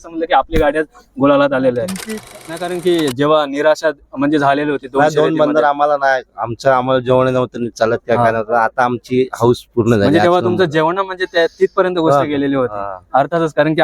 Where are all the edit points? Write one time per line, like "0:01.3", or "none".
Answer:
0:02.0